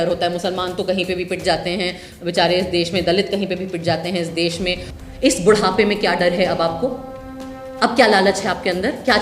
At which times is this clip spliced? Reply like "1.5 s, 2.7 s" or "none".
4.9 s